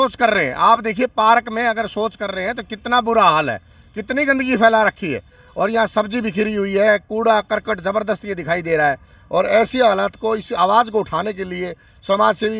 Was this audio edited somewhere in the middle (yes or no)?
no